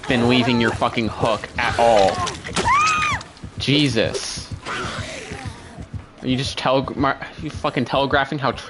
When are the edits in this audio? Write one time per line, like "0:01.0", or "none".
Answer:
0:02.4